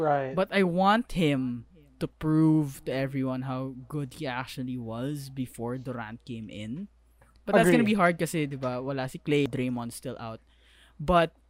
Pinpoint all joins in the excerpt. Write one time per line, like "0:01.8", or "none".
0:09.5